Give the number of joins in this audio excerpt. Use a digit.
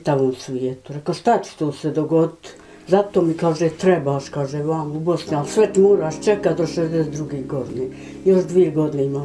0